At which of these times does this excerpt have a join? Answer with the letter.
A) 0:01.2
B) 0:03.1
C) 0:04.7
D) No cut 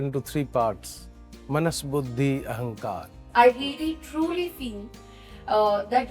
B